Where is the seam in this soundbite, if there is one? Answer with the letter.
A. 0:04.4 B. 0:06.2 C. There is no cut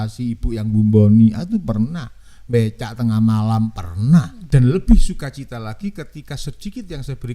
A